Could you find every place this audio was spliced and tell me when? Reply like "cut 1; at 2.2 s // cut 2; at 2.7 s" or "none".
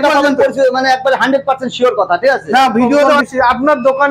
cut 1; at 3.2 s